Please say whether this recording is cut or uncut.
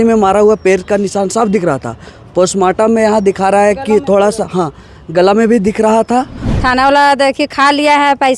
cut